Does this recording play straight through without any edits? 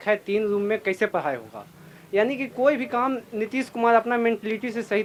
yes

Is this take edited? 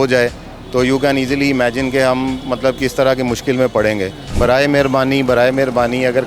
yes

